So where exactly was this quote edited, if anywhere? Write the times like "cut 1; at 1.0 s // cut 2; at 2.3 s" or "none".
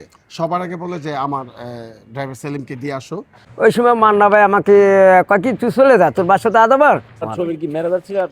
cut 1; at 3.4 s // cut 2; at 7.3 s